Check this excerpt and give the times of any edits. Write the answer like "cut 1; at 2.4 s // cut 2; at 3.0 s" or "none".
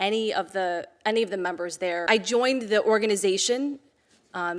cut 1; at 2.0 s

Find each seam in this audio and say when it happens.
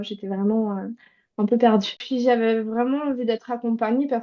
cut 1; at 2.0 s

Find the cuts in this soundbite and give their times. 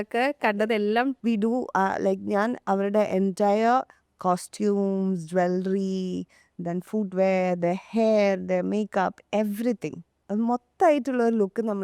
cut 1; at 1.2 s

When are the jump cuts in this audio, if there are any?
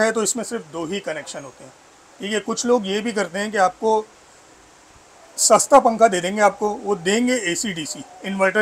none

